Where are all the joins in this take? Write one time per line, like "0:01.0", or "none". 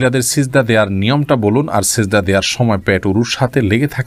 none